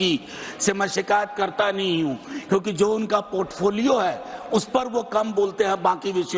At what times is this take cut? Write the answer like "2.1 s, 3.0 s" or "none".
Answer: none